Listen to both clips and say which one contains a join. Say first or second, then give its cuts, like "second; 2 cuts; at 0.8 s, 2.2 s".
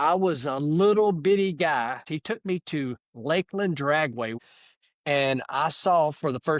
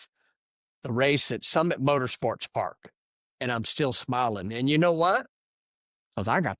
first; 2 cuts; at 2.0 s, 4.3 s